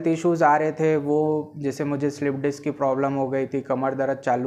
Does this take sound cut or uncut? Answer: uncut